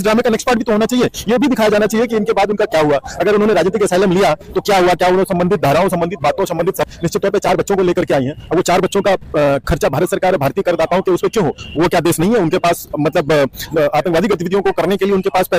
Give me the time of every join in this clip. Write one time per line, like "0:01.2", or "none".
none